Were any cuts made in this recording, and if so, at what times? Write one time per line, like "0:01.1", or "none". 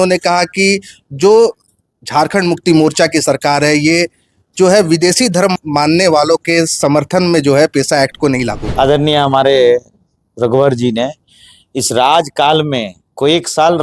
0:08.6